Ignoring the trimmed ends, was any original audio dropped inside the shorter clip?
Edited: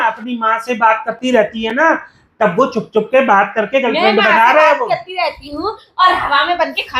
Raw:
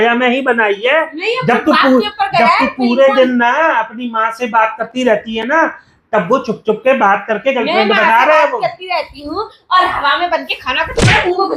no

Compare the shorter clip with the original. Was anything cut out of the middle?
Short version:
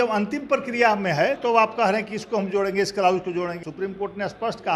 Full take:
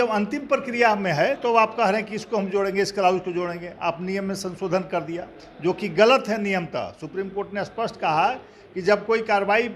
yes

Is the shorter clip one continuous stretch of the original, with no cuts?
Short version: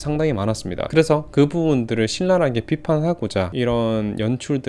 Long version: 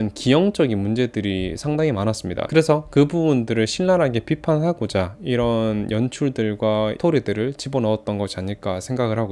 no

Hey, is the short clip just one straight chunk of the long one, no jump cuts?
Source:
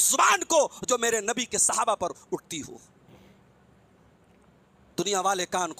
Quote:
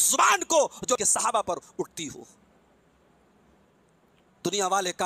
no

